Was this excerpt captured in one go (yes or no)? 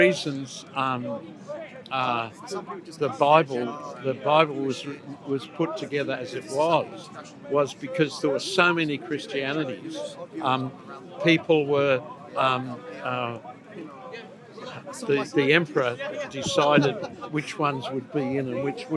yes